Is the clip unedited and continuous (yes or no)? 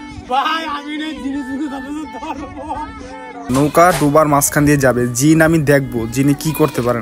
no